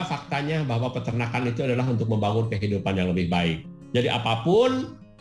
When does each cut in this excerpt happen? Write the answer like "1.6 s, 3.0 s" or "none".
none